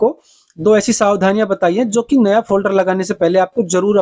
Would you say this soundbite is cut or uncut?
uncut